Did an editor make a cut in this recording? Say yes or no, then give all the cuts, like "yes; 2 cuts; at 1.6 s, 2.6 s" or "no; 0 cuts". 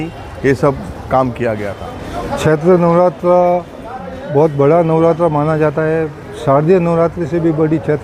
no; 0 cuts